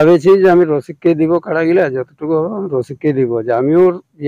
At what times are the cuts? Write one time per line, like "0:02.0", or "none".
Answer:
none